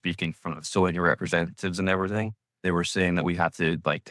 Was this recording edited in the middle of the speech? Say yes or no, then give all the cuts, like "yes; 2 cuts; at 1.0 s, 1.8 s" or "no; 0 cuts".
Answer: yes; 1 cut; at 2.6 s